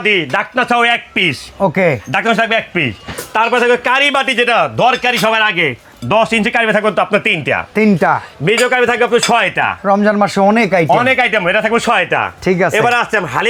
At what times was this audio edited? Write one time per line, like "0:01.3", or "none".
none